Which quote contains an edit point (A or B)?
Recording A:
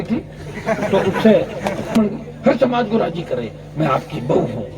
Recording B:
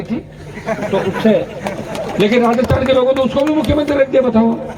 A